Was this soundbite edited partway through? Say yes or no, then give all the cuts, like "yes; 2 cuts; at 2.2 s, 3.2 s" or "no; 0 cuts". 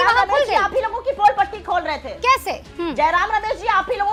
no; 0 cuts